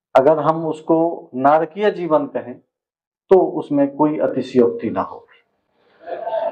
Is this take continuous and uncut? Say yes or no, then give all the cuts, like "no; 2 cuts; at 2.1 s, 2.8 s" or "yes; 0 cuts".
yes; 0 cuts